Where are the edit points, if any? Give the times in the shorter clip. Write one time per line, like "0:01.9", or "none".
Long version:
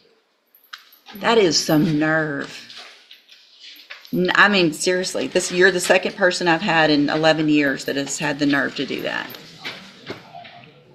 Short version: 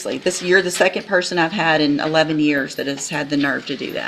none